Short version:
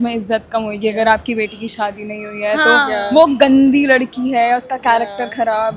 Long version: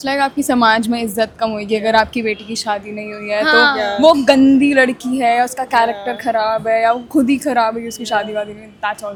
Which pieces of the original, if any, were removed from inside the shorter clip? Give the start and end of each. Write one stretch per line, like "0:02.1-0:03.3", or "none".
none